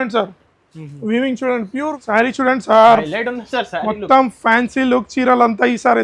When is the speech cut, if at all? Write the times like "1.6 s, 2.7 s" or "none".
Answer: 1.9 s